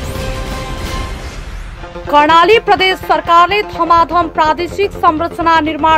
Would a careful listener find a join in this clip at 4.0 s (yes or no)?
no